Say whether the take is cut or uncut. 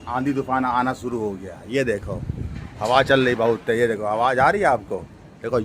uncut